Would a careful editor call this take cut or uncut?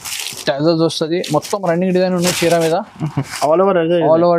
uncut